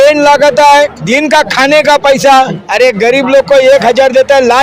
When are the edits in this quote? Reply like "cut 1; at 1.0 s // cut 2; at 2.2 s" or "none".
cut 1; at 1.0 s // cut 2; at 2.6 s